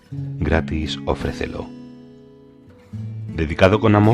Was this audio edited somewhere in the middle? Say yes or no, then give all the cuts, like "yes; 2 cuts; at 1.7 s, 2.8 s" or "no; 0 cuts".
yes; 2 cuts; at 1.6 s, 3.3 s